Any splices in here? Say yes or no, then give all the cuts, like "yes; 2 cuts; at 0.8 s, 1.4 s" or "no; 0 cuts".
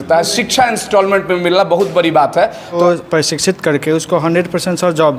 yes; 1 cut; at 2.8 s